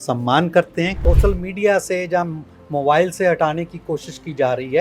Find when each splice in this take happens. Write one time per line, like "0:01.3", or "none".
0:01.0